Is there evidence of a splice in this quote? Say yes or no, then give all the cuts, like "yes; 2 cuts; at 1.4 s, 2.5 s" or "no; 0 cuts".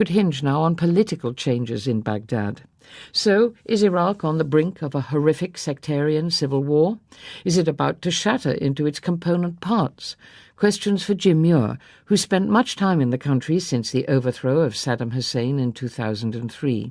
no; 0 cuts